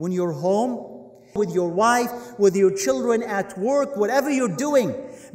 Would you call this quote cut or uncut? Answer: cut